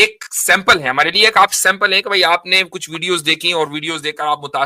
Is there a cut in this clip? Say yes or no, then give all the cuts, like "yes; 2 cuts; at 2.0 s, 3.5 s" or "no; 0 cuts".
no; 0 cuts